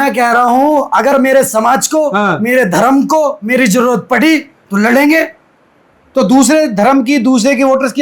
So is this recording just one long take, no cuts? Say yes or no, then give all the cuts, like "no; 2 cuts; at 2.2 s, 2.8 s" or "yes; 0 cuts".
yes; 0 cuts